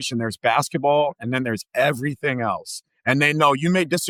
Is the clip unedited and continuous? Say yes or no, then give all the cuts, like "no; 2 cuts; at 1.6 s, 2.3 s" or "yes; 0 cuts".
yes; 0 cuts